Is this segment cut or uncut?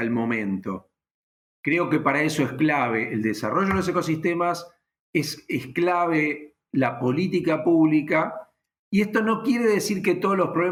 uncut